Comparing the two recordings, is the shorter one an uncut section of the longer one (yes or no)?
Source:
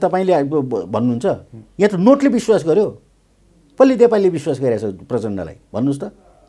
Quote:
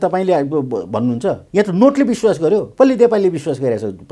no